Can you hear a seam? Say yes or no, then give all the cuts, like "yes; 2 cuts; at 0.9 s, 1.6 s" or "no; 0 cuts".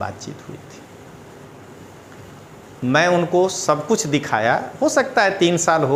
no; 0 cuts